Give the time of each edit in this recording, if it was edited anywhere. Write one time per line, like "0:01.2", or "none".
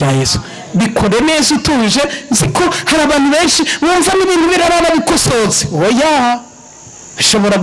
none